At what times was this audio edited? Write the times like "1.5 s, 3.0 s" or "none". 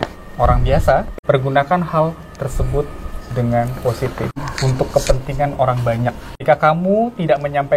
1.1 s, 4.4 s, 6.3 s